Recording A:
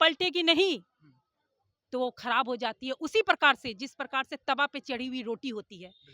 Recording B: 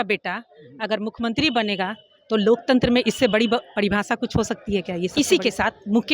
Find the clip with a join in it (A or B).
B